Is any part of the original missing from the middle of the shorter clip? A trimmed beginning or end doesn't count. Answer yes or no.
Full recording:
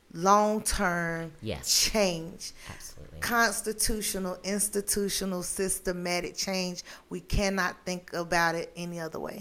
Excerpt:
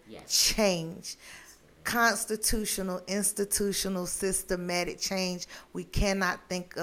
no